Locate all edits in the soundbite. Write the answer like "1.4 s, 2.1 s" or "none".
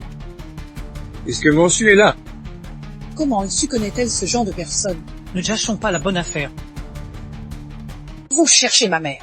1.2 s, 6.5 s, 8.3 s